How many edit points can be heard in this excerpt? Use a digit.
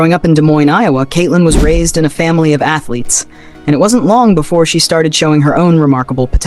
0